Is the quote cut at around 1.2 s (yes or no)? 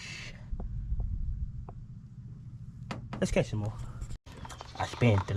no